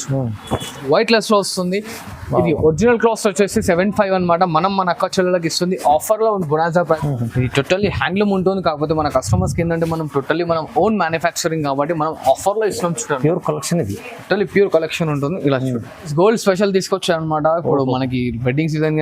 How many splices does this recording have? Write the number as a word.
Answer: three